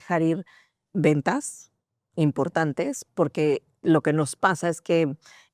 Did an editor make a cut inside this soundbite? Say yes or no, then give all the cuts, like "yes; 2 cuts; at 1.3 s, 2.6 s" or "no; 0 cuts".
no; 0 cuts